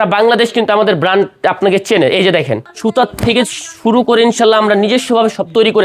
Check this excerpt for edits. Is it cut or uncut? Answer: cut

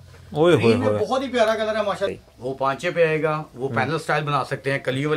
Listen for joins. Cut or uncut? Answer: cut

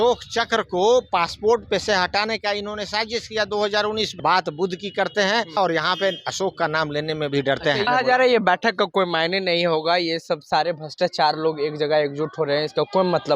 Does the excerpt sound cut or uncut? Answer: cut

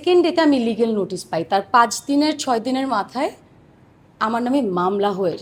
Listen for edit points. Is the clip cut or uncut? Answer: uncut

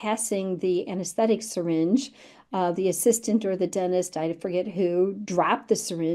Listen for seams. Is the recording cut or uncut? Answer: uncut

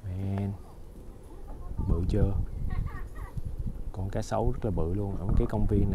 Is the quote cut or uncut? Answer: uncut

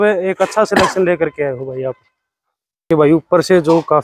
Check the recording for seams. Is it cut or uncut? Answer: cut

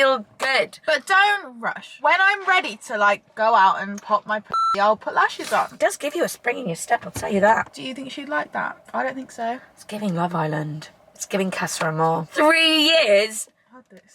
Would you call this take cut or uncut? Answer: cut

